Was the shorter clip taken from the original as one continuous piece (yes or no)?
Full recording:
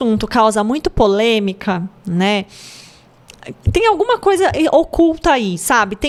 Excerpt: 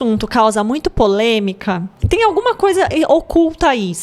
no